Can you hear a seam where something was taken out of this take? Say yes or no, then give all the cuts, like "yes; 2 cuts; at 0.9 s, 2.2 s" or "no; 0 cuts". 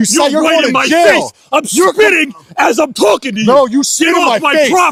no; 0 cuts